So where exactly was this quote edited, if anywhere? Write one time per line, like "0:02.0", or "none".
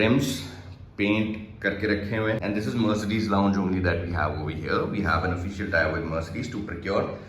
0:02.4